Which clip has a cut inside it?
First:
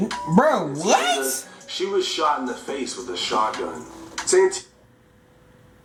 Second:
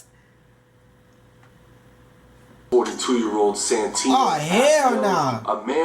second; 1 cut; at 2.7 s

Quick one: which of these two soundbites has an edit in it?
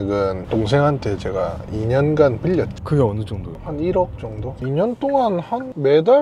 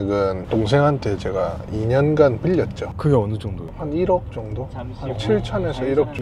first; 2 cuts; at 2.8 s, 4.6 s

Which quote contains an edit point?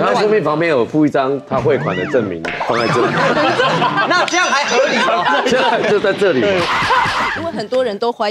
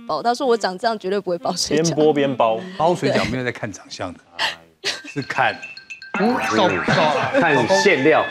first; 1 cut; at 7.4 s

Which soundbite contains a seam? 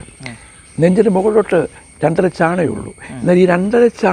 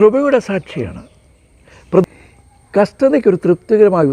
second; 1 cut; at 2.0 s

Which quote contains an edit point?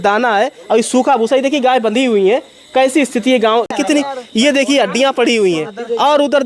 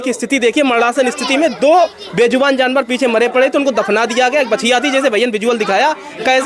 first; 1 cut; at 3.8 s

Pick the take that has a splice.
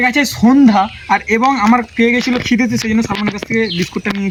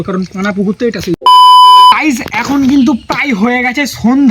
second; 2 cuts; at 1.3 s, 2.0 s

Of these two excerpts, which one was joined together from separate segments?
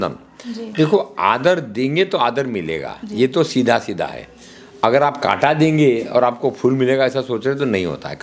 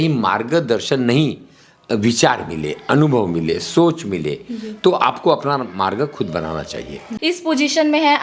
second; 1 cut; at 7.1 s

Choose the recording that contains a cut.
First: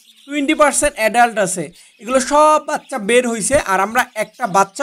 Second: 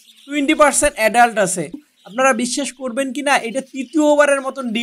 second; 1 cut; at 1.9 s

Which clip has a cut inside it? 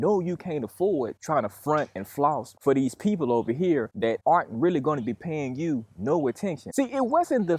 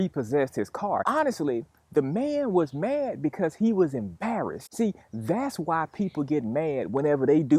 first; 2 cuts; at 1.2 s, 6.7 s

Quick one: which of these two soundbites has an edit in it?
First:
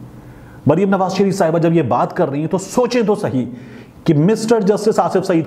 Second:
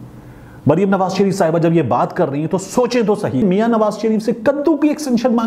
second; 1 cut; at 3.4 s

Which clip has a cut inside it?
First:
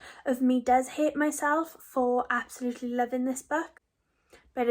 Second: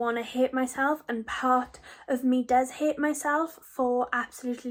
first; 1 cut; at 3.8 s

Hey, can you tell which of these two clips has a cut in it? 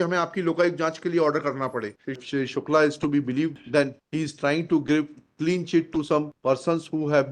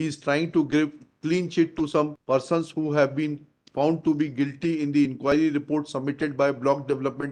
first; 1 cut; at 2.2 s

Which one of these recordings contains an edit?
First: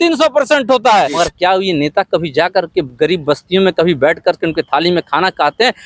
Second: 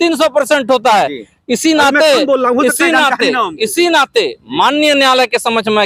first; 1 cut; at 1.1 s

